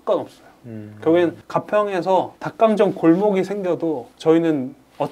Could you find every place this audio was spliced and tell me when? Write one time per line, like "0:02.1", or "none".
0:01.4
0:02.4
0:04.1